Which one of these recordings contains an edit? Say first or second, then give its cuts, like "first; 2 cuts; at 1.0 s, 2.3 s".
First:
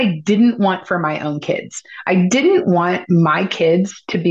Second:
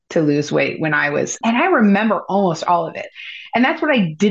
second; 2 cuts; at 1.4 s, 3.0 s